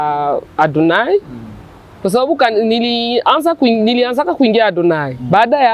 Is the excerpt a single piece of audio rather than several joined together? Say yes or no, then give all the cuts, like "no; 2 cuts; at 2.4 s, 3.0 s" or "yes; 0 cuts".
yes; 0 cuts